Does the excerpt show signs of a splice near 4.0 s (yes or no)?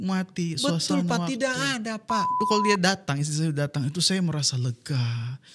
no